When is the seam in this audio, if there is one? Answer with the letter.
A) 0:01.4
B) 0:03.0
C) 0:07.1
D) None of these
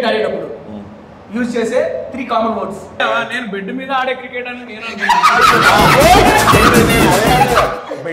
B